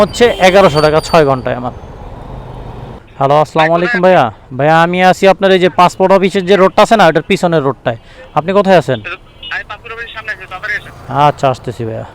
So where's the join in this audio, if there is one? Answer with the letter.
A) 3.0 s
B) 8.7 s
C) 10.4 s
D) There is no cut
A